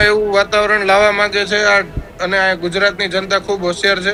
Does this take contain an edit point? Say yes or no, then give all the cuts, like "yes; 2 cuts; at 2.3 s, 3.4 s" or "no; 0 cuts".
no; 0 cuts